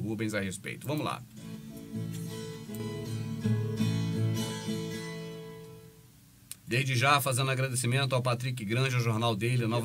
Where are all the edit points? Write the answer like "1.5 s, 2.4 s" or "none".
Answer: 3.9 s